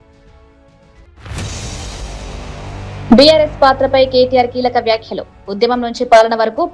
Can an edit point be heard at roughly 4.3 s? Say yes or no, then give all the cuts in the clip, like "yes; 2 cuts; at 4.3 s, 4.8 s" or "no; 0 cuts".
no; 2 cuts; at 1.1 s, 3.0 s